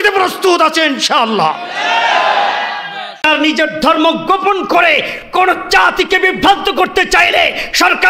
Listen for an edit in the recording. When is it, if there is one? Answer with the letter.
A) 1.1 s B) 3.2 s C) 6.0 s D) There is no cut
B